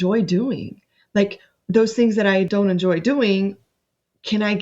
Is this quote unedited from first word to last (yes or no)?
no